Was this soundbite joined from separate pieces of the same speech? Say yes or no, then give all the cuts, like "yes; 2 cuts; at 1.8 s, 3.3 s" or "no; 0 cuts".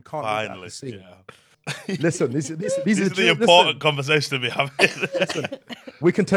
yes; 1 cut; at 1.5 s